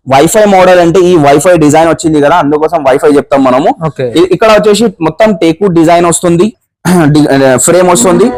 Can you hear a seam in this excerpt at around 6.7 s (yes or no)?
no